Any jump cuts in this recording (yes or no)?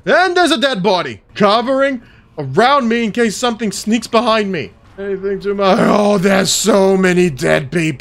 no